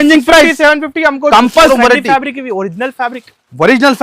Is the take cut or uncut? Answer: cut